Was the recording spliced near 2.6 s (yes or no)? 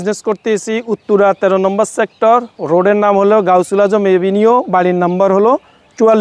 no